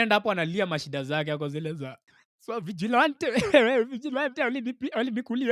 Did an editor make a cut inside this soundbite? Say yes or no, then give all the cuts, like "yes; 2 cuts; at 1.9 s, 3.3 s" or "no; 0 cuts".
no; 0 cuts